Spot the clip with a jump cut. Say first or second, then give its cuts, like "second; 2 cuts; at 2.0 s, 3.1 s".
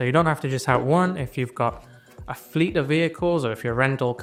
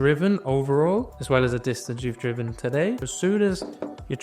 second; 2 cuts; at 1.2 s, 3.1 s